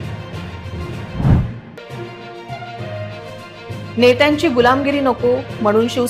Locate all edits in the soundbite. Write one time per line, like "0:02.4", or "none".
0:01.1